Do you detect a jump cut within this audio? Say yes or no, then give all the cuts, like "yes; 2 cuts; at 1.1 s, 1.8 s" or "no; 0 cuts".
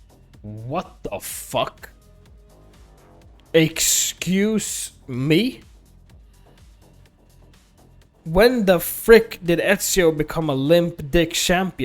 yes; 2 cuts; at 1.9 s, 3.5 s